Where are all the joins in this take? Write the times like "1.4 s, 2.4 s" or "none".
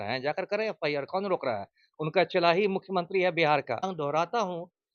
3.9 s